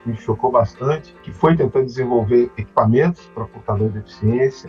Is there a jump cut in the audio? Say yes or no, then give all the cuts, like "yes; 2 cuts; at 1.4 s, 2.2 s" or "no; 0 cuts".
no; 0 cuts